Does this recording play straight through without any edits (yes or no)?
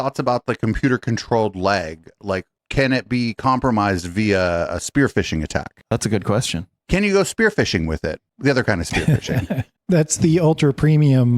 yes